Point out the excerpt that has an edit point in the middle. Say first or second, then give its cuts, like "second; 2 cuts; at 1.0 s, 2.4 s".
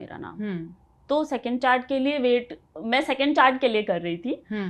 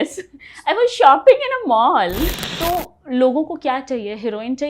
second; 1 cut; at 2.3 s